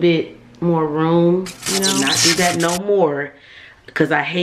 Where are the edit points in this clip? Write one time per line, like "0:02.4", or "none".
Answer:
0:02.1